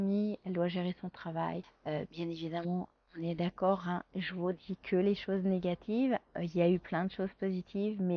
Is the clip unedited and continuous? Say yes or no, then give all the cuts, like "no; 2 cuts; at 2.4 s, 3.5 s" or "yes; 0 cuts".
no; 1 cut; at 1.7 s